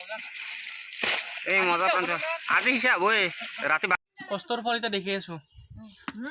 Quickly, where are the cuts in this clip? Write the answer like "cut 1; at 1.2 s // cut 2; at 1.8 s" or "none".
cut 1; at 3.9 s